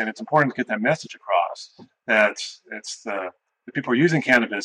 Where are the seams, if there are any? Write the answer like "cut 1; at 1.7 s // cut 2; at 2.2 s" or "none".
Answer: none